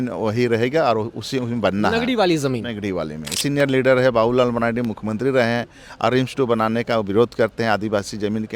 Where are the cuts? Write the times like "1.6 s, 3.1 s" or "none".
3.4 s